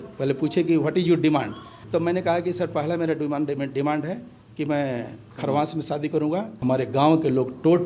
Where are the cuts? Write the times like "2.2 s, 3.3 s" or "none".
1.7 s, 6.5 s